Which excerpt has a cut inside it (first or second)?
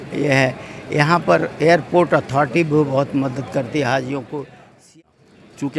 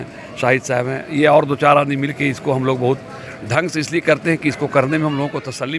first